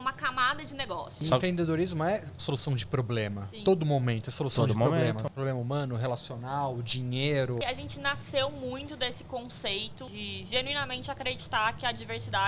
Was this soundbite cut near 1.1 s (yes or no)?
yes